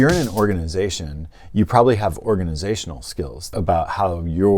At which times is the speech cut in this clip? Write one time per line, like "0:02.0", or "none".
0:03.4